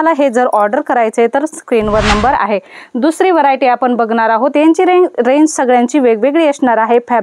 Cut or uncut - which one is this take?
uncut